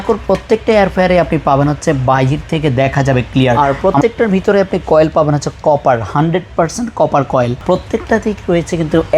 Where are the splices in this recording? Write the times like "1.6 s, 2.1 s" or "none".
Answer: 3.6 s, 7.6 s